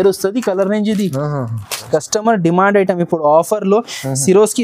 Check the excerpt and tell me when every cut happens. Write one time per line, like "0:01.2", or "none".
0:01.8